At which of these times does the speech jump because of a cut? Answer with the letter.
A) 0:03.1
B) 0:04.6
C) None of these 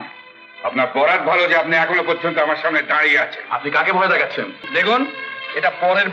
B